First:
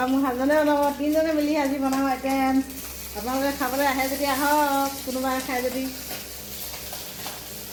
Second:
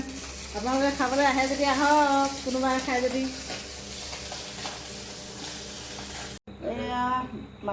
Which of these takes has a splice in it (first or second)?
second